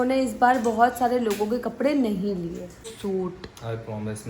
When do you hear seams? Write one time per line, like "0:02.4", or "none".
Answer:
0:02.9

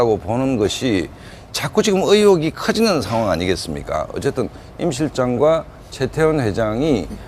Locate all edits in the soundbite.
0:02.2

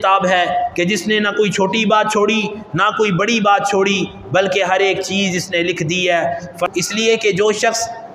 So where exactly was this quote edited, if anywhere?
0:06.7

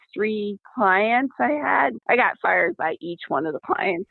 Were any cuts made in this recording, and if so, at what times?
0:01.9

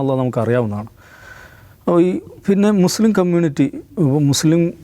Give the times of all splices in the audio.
none

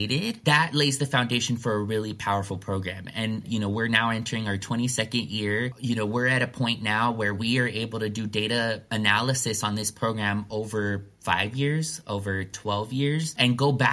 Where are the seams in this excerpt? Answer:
0:03.4
0:12.5

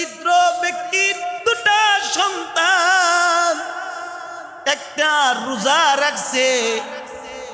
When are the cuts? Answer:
0:01.4

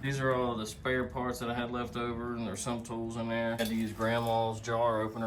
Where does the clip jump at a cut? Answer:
0:03.6

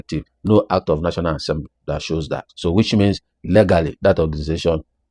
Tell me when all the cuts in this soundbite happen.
none

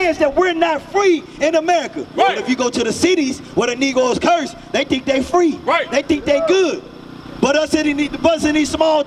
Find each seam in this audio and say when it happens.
none

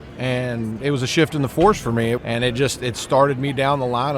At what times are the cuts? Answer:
0:02.2

